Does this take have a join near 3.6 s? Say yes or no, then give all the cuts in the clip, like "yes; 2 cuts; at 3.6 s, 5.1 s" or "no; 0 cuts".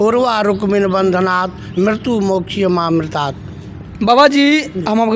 no; 0 cuts